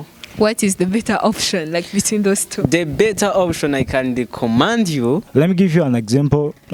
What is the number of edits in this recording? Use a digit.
1